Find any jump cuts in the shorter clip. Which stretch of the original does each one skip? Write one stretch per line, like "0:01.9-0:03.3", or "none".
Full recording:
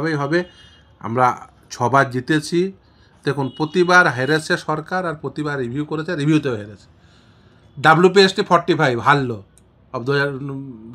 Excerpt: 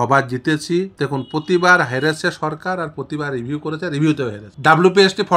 0:02.7-0:03.2
0:06.7-0:07.6